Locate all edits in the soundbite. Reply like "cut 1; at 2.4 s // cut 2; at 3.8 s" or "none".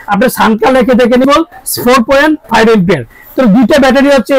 cut 1; at 1.2 s